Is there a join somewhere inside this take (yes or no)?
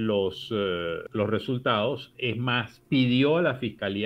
yes